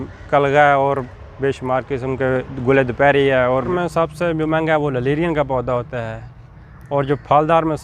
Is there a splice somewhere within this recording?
yes; 1 cut; at 3.7 s

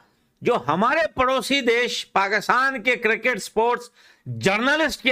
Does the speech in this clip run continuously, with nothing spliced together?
yes; 0 cuts

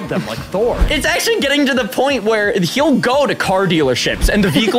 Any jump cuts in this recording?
yes; 1 cut; at 0.9 s

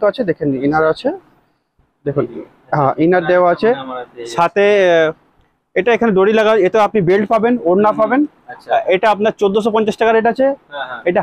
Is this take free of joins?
yes; 0 cuts

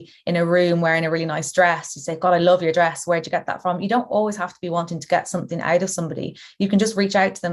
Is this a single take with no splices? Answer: yes; 0 cuts

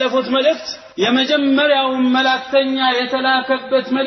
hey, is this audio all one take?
no; 1 cut; at 1.1 s

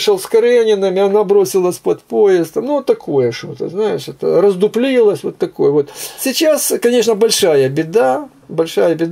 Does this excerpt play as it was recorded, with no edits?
yes; 0 cuts

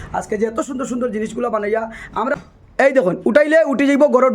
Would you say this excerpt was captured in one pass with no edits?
no; 1 cut; at 2.4 s

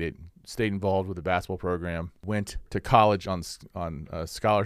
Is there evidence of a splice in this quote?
no; 0 cuts

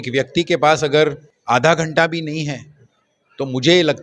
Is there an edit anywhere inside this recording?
yes; 1 cut; at 1.3 s

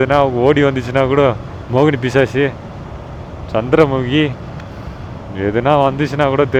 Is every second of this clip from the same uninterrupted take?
yes; 0 cuts

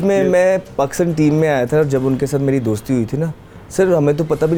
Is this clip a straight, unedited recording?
yes; 0 cuts

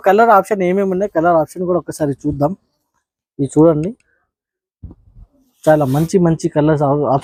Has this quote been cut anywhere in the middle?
no; 0 cuts

